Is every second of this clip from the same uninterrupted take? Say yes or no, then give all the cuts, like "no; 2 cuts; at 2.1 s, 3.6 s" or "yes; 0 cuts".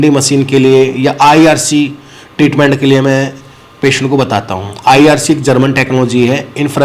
yes; 0 cuts